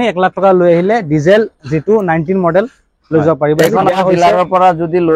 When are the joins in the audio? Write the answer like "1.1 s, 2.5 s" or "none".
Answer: 3.9 s